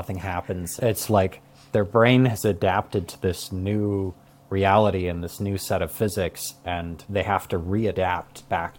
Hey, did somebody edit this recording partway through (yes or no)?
yes